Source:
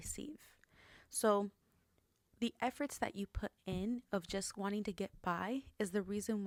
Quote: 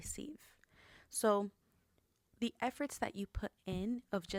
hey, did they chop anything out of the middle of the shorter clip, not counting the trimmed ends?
no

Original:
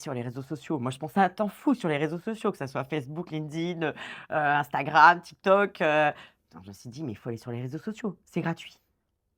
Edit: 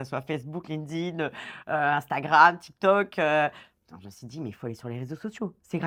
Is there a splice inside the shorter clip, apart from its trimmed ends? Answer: no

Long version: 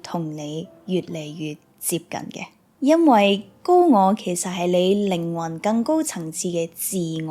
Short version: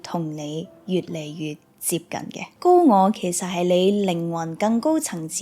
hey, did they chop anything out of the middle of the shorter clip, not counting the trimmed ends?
yes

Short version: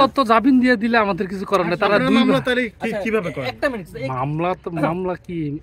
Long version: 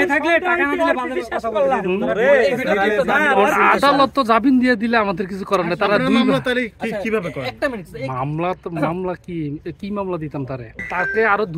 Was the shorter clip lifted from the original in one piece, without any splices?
yes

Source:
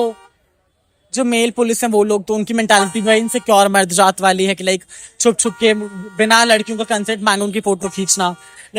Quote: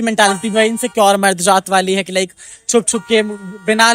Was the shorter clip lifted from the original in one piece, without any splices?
yes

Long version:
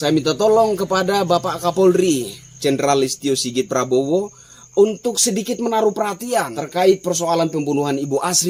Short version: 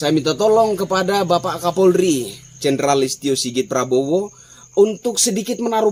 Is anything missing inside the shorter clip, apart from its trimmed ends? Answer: no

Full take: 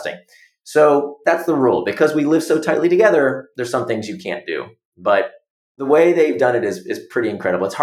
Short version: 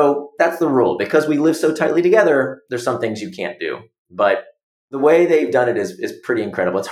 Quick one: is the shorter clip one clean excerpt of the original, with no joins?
yes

